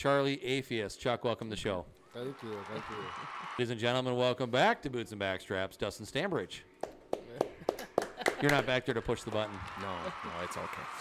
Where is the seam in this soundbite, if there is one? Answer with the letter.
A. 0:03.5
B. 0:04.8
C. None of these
A